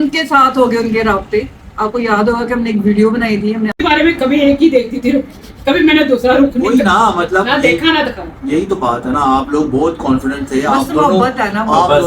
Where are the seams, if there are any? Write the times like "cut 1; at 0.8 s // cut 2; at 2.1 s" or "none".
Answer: cut 1; at 3.8 s